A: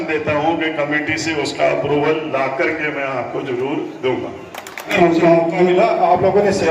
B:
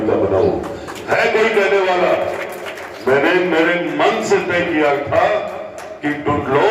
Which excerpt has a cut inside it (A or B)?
A